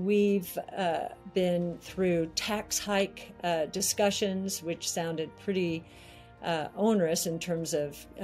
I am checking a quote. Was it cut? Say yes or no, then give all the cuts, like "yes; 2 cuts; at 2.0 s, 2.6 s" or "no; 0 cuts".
no; 0 cuts